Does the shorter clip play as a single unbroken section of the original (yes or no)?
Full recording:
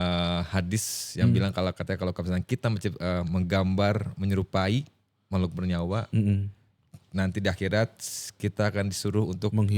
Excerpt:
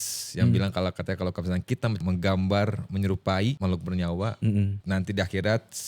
no